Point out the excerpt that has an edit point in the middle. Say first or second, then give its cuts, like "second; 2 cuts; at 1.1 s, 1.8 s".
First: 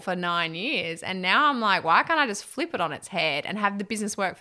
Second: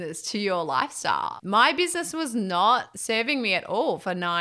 second; 2 cuts; at 1.3 s, 2.9 s